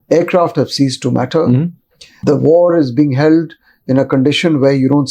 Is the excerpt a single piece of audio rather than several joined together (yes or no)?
no